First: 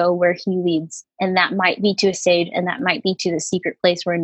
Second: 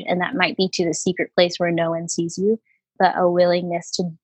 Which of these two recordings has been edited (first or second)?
first